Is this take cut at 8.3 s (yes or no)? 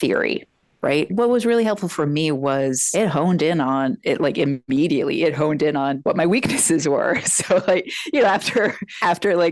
no